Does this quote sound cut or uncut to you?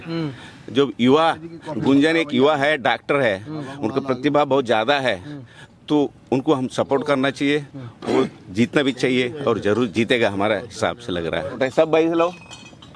cut